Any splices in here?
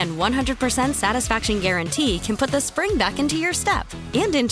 no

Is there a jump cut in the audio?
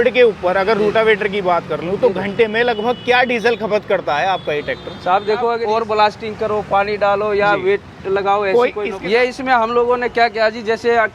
yes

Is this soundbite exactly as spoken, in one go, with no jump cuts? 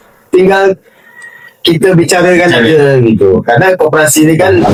yes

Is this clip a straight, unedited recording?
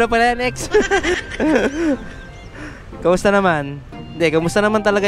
no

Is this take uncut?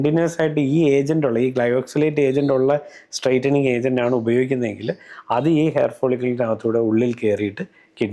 yes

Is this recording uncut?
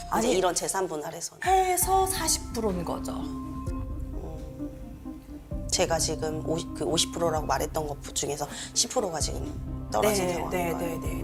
yes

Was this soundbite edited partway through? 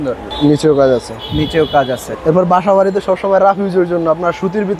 yes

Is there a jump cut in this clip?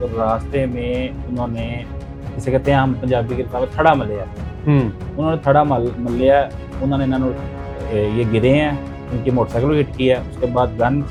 no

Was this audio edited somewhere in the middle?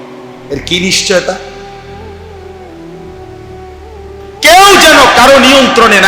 yes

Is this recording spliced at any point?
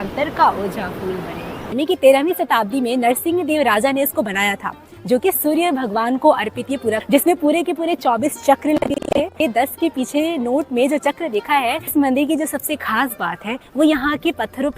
yes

